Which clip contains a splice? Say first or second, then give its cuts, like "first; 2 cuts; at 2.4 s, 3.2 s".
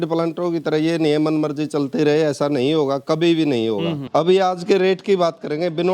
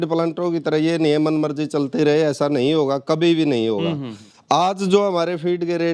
first; 1 cut; at 4.0 s